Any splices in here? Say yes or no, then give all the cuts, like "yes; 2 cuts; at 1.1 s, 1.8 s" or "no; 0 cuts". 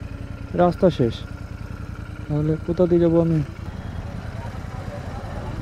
yes; 1 cut; at 3.5 s